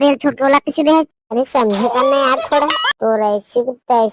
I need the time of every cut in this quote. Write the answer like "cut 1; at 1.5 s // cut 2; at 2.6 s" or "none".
cut 1; at 2.8 s